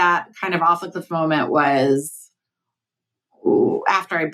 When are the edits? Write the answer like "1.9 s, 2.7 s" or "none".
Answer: none